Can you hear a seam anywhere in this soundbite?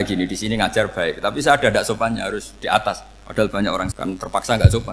yes; 1 cut; at 3.9 s

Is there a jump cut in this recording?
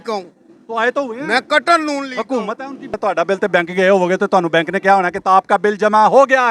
yes; 1 cut; at 3.0 s

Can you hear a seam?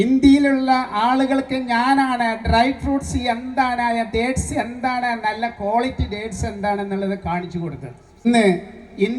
yes; 1 cut; at 8.2 s

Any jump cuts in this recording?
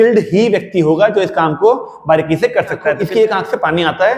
yes; 1 cut; at 3.1 s

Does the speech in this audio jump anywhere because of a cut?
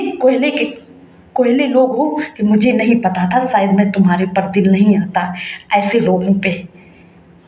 no; 0 cuts

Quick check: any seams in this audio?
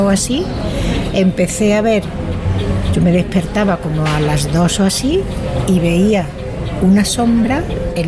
no; 0 cuts

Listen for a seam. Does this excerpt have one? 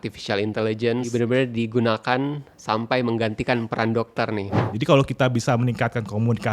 yes; 2 cuts; at 1.1 s, 4.7 s

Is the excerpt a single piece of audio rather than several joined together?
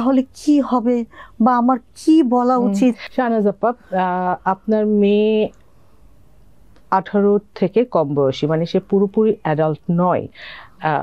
yes; 0 cuts

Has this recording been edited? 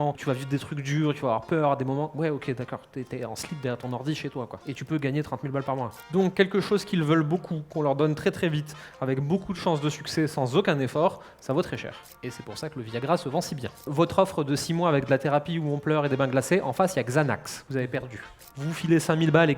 yes; 2 cuts; at 6.0 s, 13.8 s

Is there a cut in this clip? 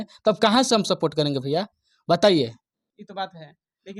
no; 0 cuts

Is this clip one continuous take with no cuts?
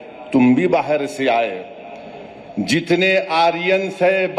yes; 0 cuts

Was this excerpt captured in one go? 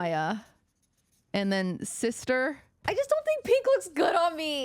no; 1 cut; at 2.8 s

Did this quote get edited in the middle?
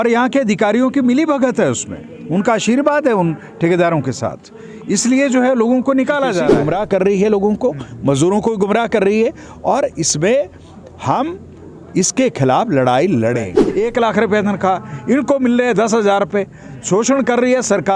yes; 2 cuts; at 6.5 s, 13.6 s

